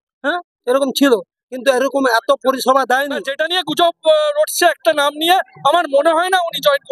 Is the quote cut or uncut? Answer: cut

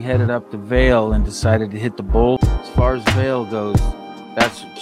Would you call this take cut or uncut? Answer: cut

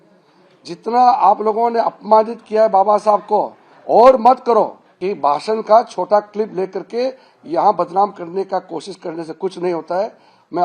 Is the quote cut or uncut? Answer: cut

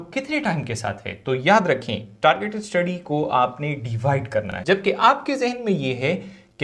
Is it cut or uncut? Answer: cut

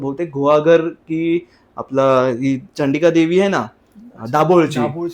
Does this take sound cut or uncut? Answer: uncut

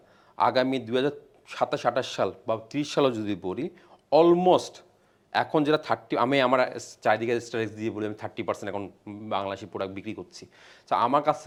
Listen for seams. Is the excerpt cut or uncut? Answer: uncut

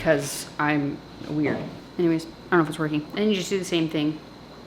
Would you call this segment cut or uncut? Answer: cut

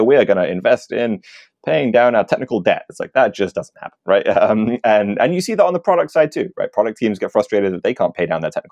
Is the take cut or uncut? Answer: uncut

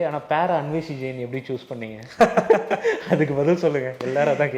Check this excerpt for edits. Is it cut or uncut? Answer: uncut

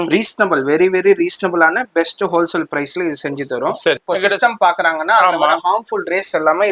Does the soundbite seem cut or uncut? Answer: cut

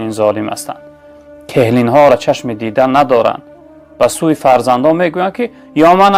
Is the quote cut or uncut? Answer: uncut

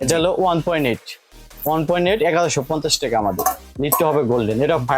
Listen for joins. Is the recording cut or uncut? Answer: uncut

